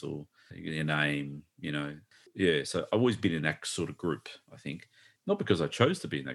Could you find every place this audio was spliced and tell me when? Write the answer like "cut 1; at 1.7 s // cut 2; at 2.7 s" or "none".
cut 1; at 2.3 s